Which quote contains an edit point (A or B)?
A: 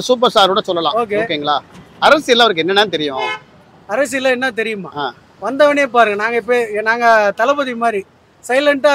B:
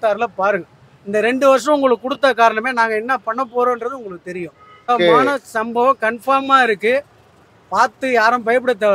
B